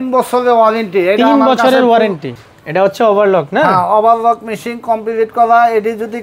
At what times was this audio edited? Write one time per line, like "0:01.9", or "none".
0:02.4